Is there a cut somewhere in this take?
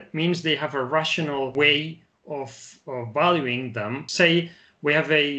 yes; 2 cuts; at 1.5 s, 4.1 s

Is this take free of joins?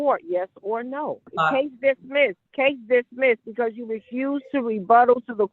no; 2 cuts; at 1.3 s, 2.4 s

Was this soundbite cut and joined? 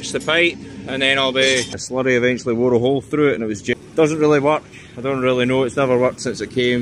yes; 2 cuts; at 1.8 s, 3.6 s

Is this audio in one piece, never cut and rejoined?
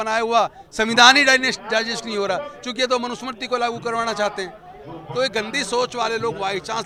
yes; 0 cuts

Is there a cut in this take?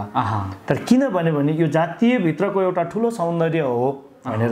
no; 0 cuts

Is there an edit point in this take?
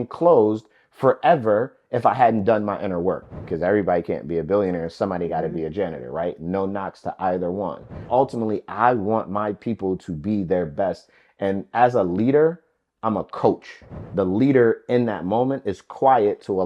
yes; 3 cuts; at 3.5 s, 8.0 s, 14.0 s

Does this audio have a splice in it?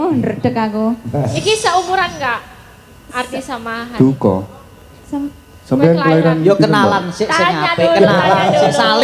no; 0 cuts

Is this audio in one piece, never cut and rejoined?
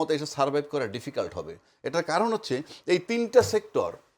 yes; 0 cuts

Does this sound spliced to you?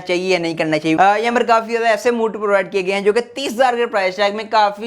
yes; 1 cut; at 1.0 s

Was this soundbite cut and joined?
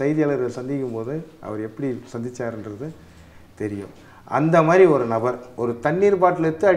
yes; 1 cut; at 5.5 s

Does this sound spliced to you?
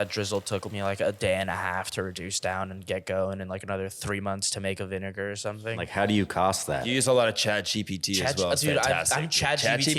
yes; 2 cuts; at 5.9 s, 6.9 s

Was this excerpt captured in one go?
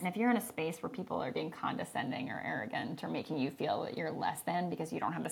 yes; 0 cuts

